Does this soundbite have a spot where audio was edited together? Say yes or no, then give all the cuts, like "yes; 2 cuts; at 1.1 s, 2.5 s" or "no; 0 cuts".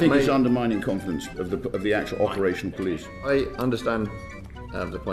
no; 0 cuts